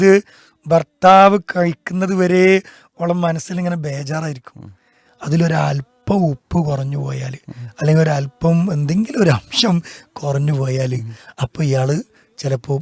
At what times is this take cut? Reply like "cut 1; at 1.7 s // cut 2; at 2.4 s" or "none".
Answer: none